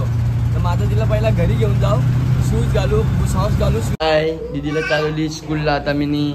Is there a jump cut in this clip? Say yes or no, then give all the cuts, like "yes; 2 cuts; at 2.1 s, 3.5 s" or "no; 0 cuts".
yes; 1 cut; at 3.9 s